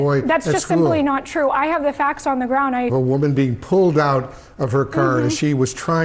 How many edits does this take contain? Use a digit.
1